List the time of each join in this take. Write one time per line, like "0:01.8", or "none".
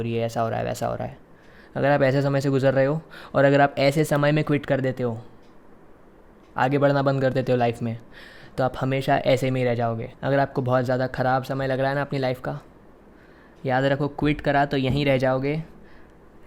0:10.1